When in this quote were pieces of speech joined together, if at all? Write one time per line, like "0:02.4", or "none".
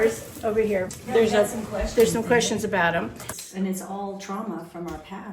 0:01.0
0:03.4